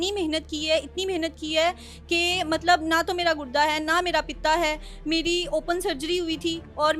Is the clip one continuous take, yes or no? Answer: yes